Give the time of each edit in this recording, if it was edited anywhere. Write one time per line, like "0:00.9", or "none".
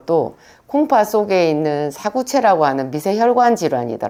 none